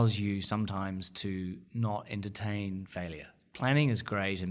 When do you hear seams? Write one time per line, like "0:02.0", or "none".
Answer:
0:03.4